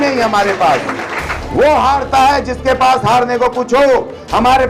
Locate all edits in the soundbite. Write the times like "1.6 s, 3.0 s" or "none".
1.1 s